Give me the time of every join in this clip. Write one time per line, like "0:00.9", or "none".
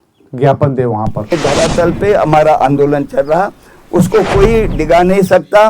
0:01.3